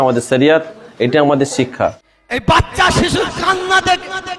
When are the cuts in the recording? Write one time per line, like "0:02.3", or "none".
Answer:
0:02.1